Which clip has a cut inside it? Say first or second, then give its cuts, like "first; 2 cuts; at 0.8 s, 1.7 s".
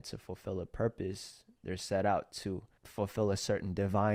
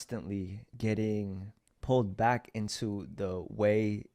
second; 1 cut; at 3.1 s